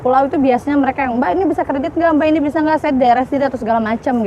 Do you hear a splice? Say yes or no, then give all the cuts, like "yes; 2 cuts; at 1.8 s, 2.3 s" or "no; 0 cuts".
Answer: no; 0 cuts